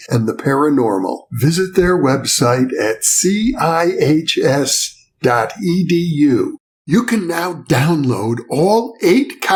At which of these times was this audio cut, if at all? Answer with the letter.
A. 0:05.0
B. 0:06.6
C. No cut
C